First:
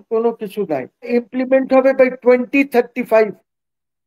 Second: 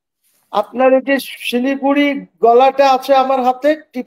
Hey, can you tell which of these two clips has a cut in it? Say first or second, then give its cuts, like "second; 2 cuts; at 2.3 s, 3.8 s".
first; 1 cut; at 1.1 s